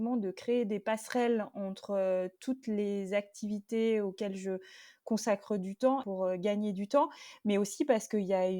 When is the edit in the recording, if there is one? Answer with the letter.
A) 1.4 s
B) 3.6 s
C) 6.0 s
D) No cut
C